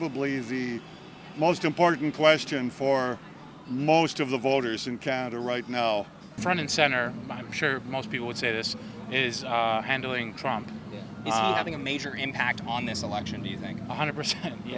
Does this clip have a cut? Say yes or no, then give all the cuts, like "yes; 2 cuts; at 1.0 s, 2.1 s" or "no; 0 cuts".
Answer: no; 0 cuts